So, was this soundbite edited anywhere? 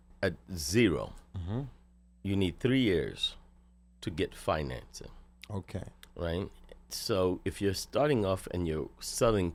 no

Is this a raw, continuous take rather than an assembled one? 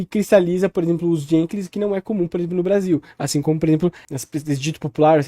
no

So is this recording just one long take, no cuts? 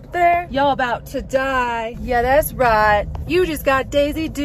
no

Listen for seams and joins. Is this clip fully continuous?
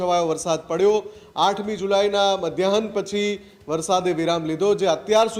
yes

